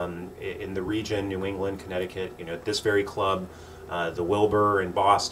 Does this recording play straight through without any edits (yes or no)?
no